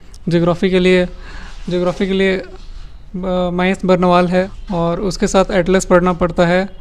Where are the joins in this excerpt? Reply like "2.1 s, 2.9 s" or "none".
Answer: 4.5 s